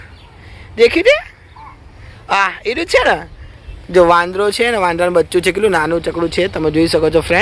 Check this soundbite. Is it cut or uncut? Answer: uncut